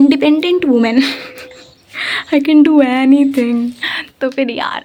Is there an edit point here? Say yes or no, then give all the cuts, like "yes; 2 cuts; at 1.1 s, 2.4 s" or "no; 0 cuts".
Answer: no; 0 cuts